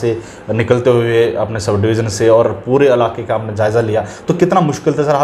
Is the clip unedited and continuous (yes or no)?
yes